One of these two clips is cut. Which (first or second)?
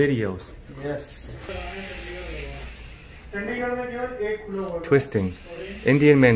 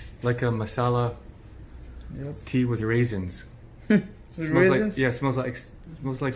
first